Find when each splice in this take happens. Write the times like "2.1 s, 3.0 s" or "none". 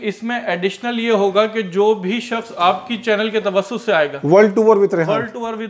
none